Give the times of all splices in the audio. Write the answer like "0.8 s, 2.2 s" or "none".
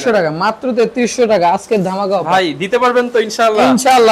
none